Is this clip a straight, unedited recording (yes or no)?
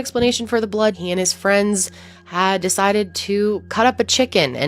no